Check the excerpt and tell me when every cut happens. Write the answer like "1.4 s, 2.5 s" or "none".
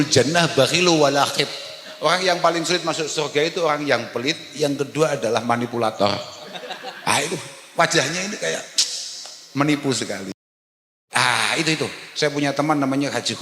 10.6 s